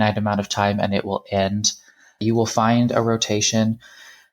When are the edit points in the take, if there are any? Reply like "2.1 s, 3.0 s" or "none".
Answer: 2.2 s